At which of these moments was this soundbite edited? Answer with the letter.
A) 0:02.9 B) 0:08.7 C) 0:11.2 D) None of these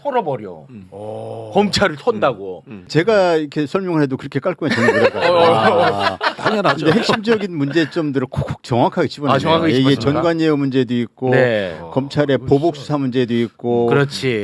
A